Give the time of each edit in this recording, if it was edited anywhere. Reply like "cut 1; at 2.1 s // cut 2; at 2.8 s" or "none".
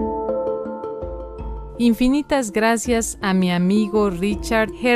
cut 1; at 1.7 s